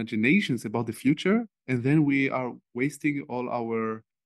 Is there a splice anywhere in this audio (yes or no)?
no